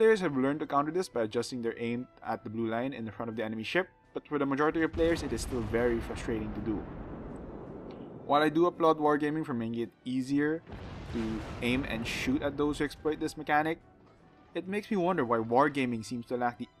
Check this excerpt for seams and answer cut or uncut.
uncut